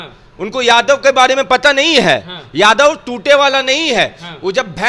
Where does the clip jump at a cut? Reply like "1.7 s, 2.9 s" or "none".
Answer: none